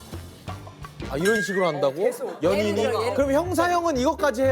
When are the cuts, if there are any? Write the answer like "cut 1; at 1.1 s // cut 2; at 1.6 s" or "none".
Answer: cut 1; at 3.1 s